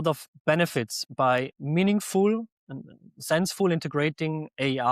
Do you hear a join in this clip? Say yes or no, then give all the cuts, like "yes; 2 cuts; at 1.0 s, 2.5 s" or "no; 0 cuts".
yes; 1 cut; at 1.0 s